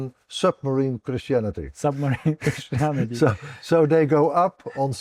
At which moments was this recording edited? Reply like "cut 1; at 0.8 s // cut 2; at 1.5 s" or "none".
none